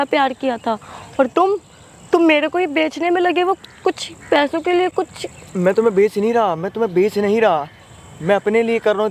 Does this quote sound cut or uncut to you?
uncut